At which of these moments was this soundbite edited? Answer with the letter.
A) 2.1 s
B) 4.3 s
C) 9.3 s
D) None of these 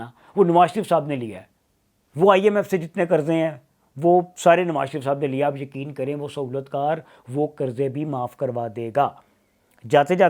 D